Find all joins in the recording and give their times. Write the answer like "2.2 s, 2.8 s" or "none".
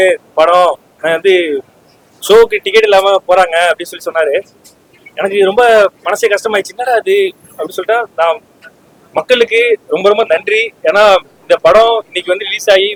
none